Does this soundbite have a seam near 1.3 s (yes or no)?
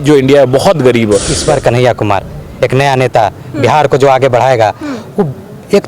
yes